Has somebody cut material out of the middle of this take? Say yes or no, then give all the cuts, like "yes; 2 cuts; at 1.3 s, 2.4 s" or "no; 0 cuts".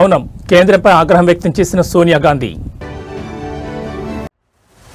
no; 0 cuts